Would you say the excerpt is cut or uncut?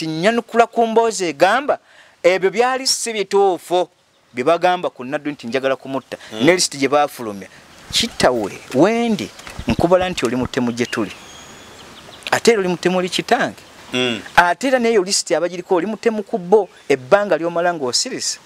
uncut